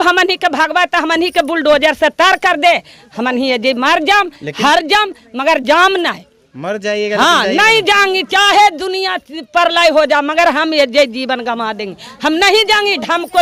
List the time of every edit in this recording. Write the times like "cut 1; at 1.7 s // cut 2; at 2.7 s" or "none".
none